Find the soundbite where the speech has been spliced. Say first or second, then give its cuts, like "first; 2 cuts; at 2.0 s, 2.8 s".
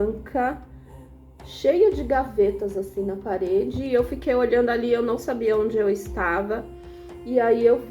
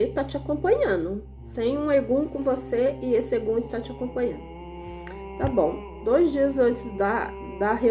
second; 1 cut; at 1.4 s